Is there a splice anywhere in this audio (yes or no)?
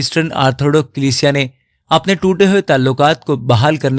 no